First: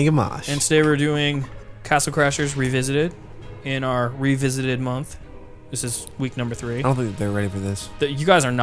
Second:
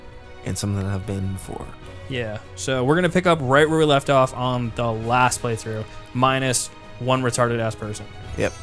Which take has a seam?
first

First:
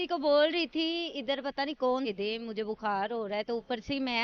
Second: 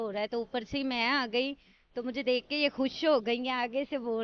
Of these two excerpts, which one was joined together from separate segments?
first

